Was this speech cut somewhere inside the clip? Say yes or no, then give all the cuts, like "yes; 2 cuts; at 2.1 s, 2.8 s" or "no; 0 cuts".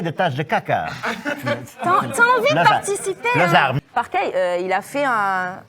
yes; 1 cut; at 3.8 s